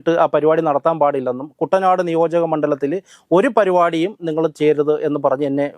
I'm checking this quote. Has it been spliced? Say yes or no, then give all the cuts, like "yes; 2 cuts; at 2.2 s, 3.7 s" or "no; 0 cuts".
no; 0 cuts